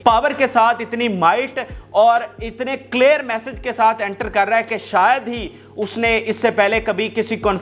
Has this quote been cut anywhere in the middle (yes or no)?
no